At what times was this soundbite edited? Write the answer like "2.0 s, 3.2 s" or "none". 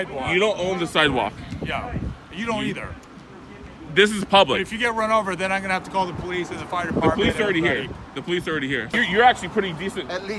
8.9 s